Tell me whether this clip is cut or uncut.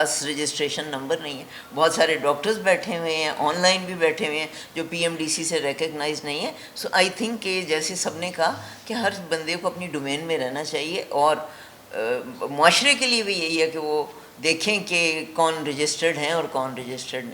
uncut